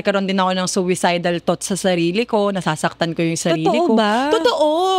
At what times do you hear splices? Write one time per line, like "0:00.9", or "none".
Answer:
none

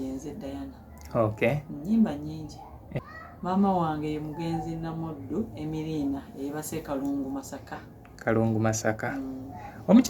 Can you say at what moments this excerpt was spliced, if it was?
0:02.9

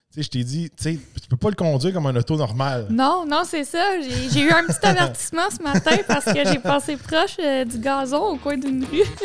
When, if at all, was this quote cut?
none

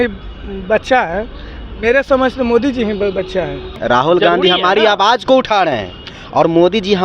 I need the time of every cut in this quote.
0:03.7

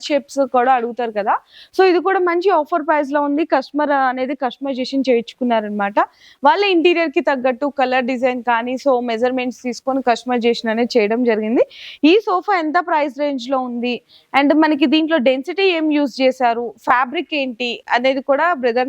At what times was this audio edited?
none

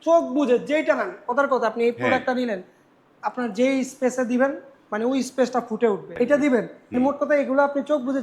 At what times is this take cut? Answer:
0:06.1
0:06.8

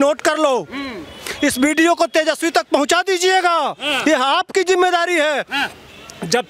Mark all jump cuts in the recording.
none

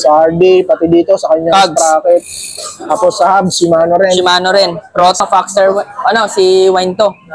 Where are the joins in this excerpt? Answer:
0:05.2

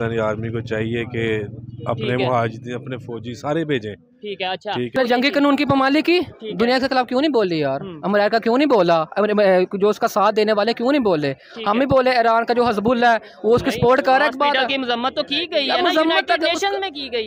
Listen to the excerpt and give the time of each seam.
0:04.9

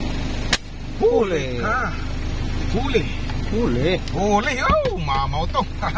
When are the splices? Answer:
none

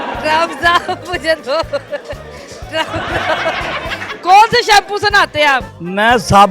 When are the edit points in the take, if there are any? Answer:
0:04.0

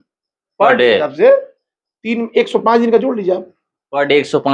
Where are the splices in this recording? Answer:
none

